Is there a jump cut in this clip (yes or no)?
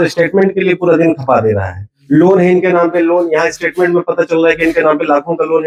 no